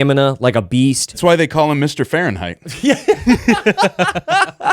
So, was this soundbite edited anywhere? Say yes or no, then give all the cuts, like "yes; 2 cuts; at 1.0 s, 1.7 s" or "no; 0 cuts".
yes; 1 cut; at 1.1 s